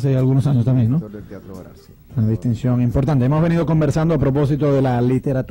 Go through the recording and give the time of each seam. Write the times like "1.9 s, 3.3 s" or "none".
2.6 s